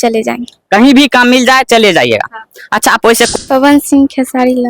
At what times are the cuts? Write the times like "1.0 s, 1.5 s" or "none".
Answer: 3.3 s